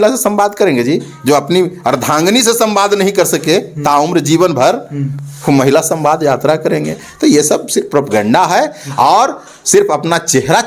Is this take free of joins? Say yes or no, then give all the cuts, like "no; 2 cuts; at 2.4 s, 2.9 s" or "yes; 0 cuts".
yes; 0 cuts